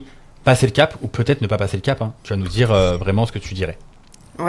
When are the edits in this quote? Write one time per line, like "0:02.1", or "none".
none